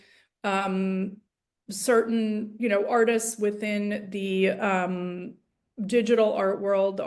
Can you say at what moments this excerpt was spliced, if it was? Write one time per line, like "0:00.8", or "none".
none